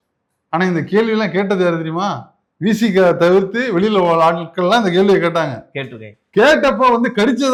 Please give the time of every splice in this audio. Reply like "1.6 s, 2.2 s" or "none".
none